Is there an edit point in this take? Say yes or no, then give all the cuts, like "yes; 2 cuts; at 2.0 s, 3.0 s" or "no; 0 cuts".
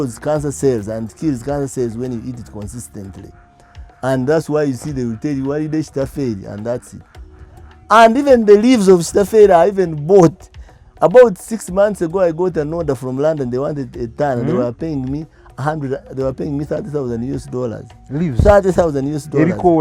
no; 0 cuts